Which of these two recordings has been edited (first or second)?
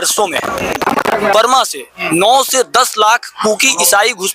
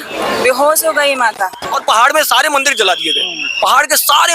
second